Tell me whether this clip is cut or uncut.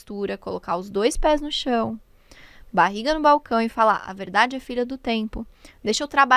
uncut